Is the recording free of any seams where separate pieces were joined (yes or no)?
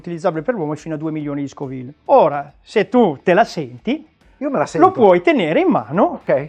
no